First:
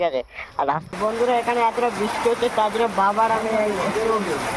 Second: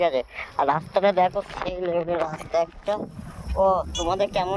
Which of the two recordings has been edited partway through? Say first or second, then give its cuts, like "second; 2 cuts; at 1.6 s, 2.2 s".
first; 1 cut; at 0.9 s